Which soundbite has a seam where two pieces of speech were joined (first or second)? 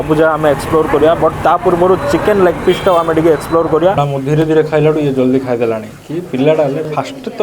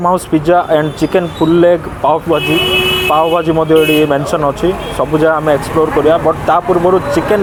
first